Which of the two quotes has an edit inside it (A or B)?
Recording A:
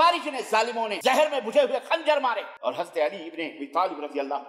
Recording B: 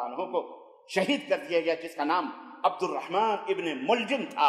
A